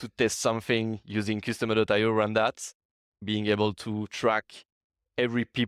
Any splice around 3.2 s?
yes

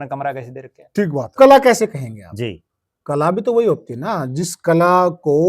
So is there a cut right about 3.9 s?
no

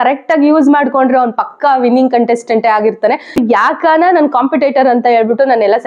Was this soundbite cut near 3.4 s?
yes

